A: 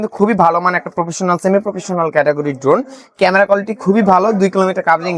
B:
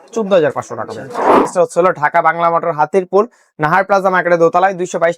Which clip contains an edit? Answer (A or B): B